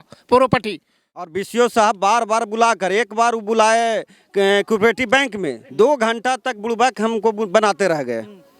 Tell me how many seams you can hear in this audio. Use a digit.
1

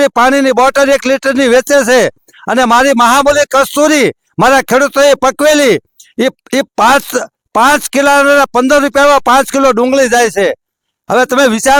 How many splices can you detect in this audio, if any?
0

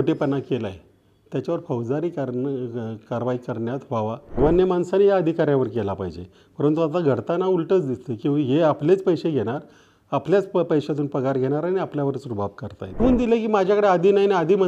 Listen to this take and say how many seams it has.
2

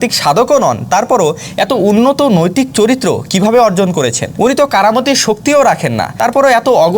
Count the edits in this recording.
2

